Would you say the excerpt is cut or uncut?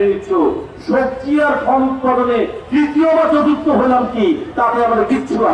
uncut